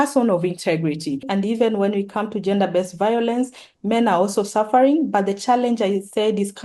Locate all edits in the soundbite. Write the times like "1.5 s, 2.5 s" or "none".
1.3 s